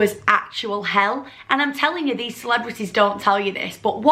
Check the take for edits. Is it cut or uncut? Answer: uncut